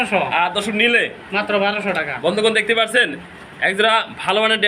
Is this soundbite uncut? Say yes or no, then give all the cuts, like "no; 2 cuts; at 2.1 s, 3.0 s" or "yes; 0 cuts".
yes; 0 cuts